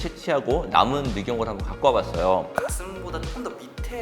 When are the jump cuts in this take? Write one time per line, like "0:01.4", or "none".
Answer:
0:02.5